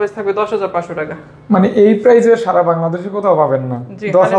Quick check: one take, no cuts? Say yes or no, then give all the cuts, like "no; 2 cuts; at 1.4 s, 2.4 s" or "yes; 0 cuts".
yes; 0 cuts